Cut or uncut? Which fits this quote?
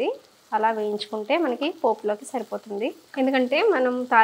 uncut